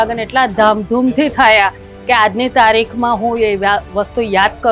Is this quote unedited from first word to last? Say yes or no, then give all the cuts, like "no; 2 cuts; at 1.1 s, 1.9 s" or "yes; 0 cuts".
yes; 0 cuts